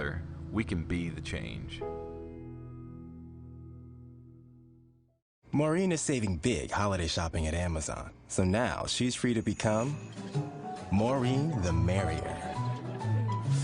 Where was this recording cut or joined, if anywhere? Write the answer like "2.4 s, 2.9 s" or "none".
4.8 s

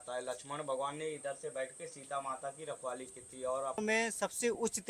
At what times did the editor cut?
3.8 s

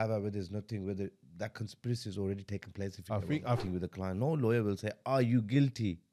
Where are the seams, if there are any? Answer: 3.6 s

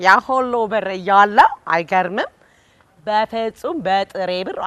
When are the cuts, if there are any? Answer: none

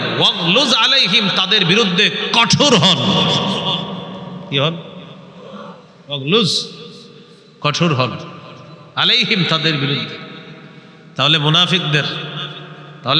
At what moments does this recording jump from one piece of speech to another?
none

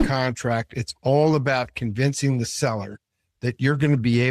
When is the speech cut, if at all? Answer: none

